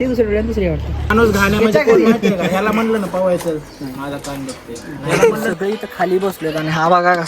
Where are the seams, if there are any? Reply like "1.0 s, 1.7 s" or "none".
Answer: 1.0 s, 5.5 s